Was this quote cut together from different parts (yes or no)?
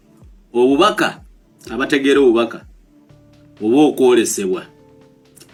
no